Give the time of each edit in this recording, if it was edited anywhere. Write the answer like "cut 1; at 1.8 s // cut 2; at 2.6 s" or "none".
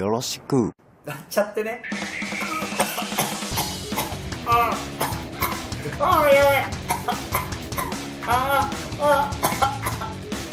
cut 1; at 1.8 s // cut 2; at 3.9 s